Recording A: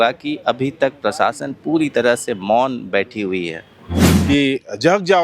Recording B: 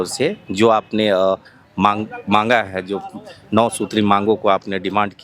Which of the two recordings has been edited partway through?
A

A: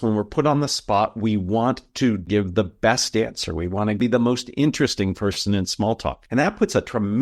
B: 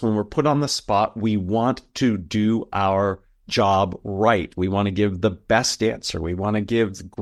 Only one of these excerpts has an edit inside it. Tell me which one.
A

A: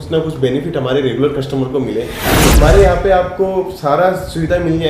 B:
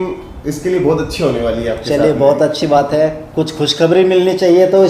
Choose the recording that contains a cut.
A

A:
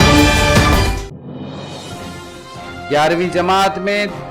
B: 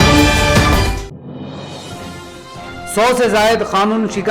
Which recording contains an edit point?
A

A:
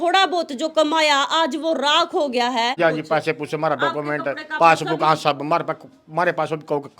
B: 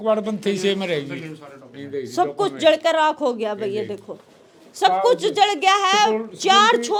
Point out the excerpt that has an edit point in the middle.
A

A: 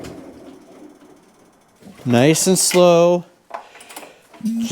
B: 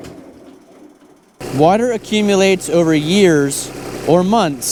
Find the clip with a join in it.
A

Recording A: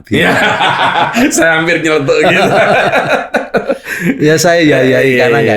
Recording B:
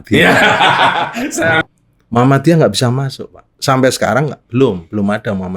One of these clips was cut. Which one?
B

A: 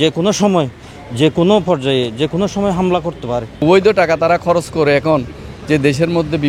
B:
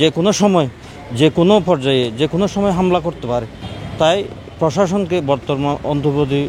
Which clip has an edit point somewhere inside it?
A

